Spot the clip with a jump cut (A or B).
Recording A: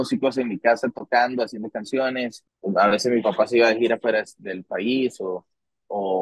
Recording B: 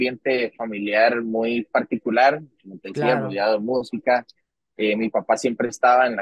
A